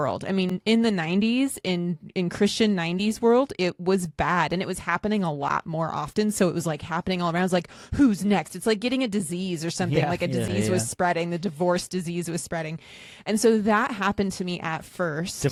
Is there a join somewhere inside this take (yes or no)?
no